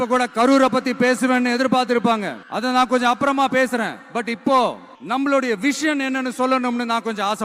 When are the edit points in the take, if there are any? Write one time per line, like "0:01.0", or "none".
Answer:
0:02.4
0:04.9